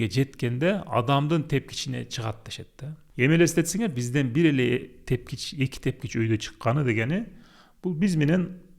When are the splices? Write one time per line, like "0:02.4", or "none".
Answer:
0:03.0